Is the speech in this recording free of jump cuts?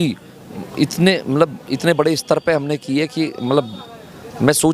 yes; 0 cuts

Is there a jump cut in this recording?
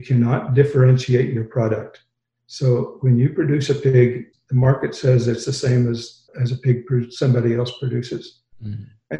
yes; 2 cuts; at 4.3 s, 6.3 s

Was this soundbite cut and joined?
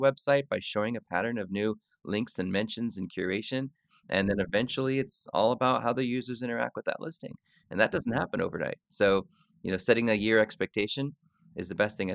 no; 0 cuts

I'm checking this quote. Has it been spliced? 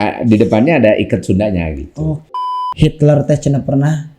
yes; 1 cut; at 2.2 s

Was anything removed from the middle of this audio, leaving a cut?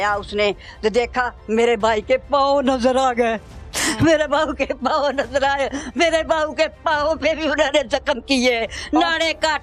no; 0 cuts

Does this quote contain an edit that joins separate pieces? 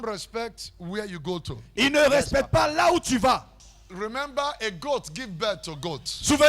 yes; 1 cut; at 3.6 s

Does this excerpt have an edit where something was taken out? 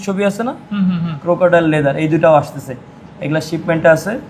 yes; 1 cut; at 1.1 s

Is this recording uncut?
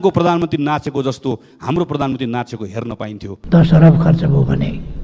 no; 1 cut; at 3.3 s

